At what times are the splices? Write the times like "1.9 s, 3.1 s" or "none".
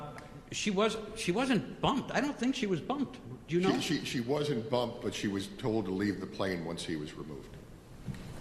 none